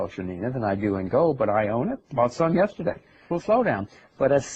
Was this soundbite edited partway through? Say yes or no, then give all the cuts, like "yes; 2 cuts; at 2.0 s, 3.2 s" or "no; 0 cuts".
no; 0 cuts